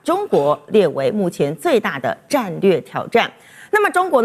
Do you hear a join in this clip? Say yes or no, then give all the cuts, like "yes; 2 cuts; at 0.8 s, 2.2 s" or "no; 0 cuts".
no; 0 cuts